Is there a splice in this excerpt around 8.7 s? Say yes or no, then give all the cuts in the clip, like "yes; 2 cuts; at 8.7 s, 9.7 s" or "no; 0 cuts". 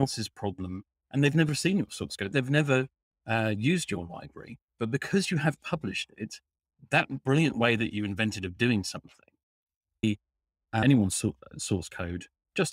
no; 1 cut; at 10.0 s